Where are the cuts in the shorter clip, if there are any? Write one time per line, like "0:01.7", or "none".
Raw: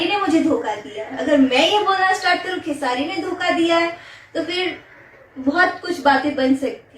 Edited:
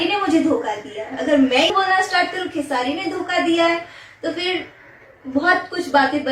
0:01.7